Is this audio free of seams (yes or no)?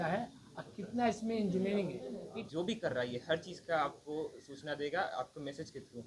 no